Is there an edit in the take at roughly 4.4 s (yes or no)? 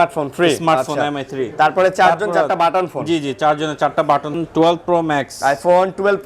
yes